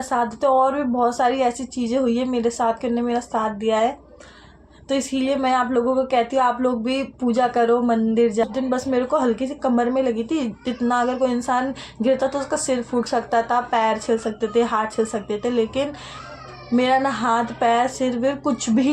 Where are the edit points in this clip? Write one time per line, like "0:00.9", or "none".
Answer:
0:08.5